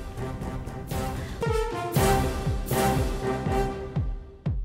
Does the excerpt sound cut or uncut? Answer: uncut